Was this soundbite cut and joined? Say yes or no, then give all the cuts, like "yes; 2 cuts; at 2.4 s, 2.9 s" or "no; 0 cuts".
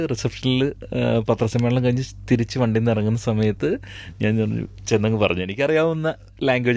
no; 0 cuts